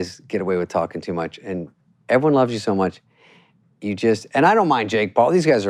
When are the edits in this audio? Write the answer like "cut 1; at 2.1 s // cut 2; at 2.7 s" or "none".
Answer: none